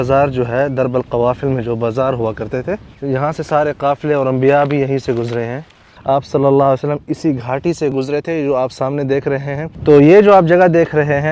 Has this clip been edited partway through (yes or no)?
yes